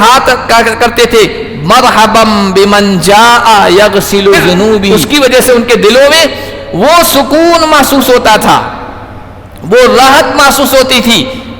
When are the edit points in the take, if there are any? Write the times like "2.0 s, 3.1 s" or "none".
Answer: 4.9 s